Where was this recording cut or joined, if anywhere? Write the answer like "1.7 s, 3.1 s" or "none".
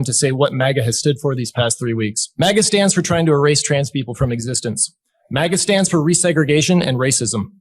2.2 s

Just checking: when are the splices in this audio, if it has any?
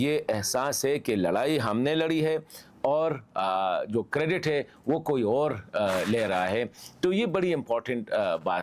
none

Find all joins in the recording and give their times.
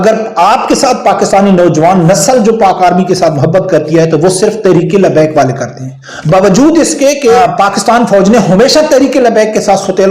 7.4 s

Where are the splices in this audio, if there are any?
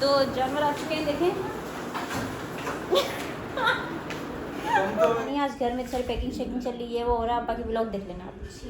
2.1 s, 5.3 s

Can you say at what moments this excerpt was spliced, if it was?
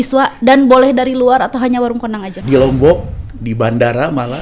2.3 s

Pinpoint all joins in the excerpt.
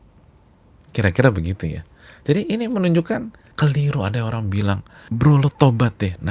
3.4 s, 4.9 s

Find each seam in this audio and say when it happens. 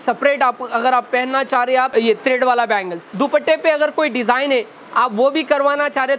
1.9 s, 3.1 s

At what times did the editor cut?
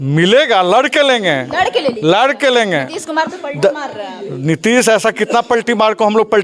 none

